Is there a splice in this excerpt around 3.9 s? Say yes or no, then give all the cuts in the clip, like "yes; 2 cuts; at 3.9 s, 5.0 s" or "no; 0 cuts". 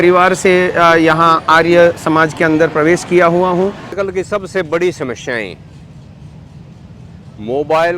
yes; 1 cut; at 3.9 s